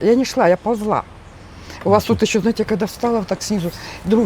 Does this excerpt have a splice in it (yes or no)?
no